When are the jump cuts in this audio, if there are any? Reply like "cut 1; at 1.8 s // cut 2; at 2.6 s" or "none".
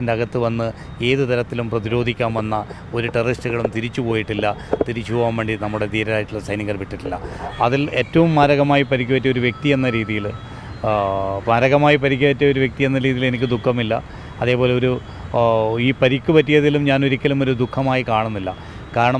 cut 1; at 7.4 s